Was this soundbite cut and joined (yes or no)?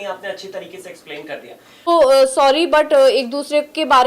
yes